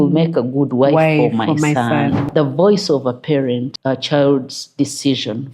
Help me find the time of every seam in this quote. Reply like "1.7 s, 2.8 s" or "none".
2.3 s, 3.7 s

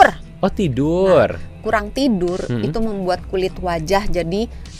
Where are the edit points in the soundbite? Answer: none

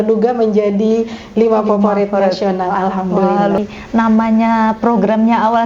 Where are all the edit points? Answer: 3.6 s

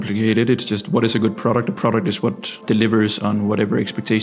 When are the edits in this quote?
2.6 s

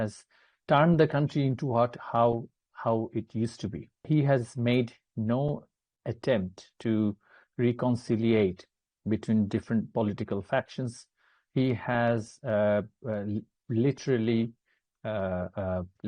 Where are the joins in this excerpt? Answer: 4.0 s

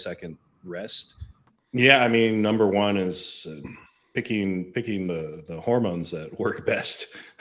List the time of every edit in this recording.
1.5 s

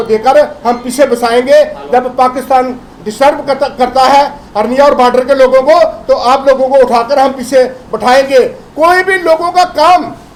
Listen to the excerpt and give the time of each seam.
none

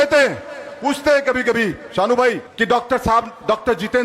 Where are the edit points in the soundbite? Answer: 2.5 s

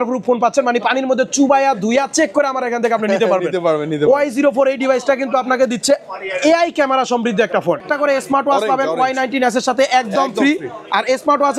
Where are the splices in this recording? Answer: 7.8 s

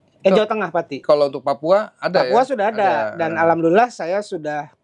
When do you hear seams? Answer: 0.9 s

